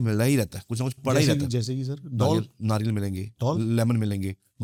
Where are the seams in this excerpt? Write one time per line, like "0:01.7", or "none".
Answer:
none

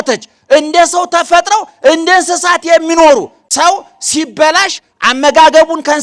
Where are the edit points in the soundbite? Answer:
0:03.4

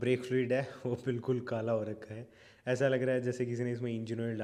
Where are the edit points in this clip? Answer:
none

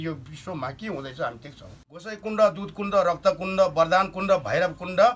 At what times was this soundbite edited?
0:02.1

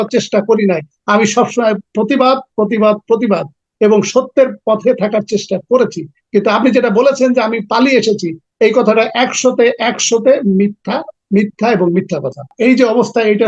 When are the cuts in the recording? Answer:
0:12.5

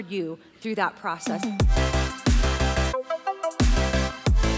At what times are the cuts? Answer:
0:01.2

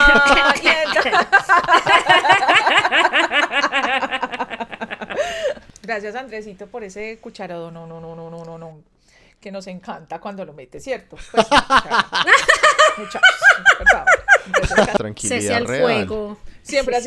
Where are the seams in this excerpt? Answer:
0:05.7
0:15.0

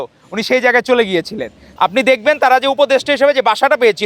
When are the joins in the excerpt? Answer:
0:01.6

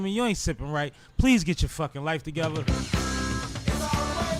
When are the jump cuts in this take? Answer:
0:02.6

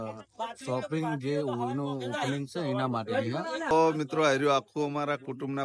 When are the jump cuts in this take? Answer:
0:03.7

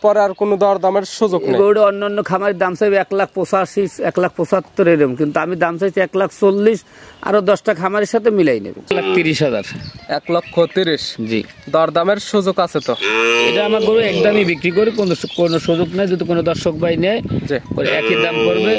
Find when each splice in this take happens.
0:08.9

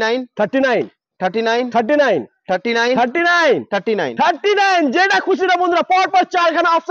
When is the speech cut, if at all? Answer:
none

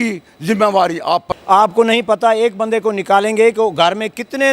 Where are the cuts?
0:01.3

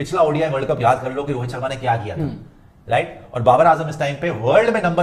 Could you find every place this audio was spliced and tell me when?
none

